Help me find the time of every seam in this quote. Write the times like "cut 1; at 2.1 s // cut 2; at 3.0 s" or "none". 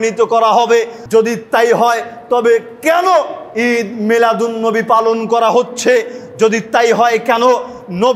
cut 1; at 1.0 s